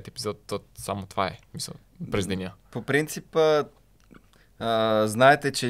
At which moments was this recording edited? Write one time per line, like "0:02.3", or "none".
none